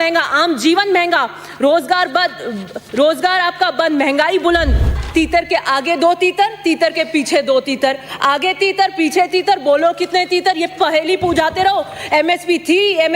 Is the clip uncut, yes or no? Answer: no